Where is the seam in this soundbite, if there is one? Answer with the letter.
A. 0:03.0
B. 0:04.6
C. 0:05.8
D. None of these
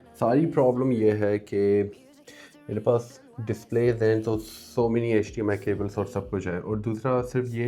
D